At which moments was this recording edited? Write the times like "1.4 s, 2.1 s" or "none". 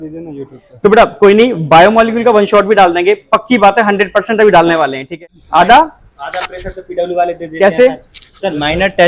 5.1 s